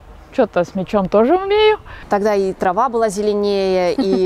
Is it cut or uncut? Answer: cut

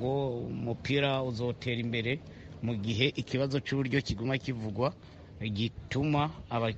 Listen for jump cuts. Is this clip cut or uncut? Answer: uncut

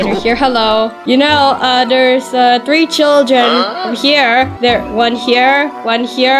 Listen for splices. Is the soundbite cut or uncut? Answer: cut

